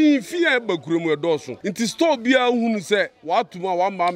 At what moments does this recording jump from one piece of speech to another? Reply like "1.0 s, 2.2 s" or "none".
1.6 s